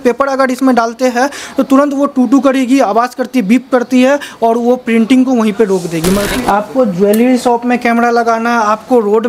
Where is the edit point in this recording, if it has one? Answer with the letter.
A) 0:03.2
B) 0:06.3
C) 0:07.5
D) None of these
B